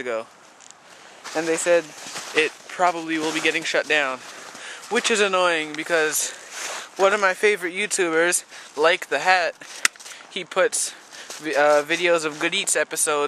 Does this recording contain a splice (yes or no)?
no